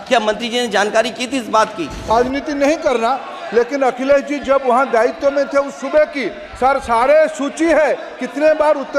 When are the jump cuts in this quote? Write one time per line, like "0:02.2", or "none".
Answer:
0:02.1